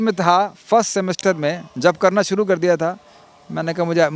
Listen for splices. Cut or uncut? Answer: uncut